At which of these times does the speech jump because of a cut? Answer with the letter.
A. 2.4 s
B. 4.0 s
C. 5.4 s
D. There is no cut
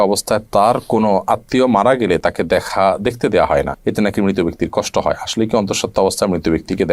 D